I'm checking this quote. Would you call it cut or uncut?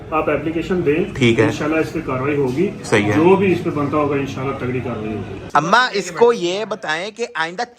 cut